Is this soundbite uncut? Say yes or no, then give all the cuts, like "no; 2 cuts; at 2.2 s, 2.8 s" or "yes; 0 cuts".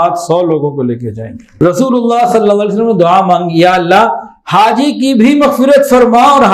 no; 1 cut; at 1.4 s